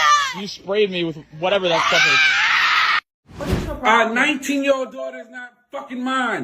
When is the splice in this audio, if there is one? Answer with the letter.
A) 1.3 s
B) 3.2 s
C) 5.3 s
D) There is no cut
B